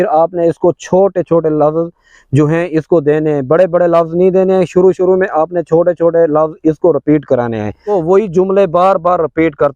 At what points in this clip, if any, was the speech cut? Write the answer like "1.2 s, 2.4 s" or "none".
7.8 s

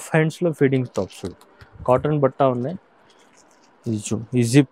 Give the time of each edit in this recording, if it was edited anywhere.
none

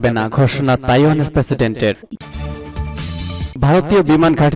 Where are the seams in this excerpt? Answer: 2.0 s

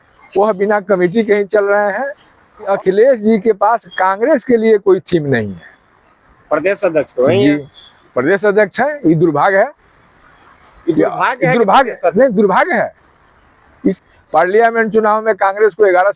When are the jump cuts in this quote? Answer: 2.7 s, 13.9 s

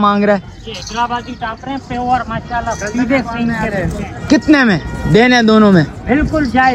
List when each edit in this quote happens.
none

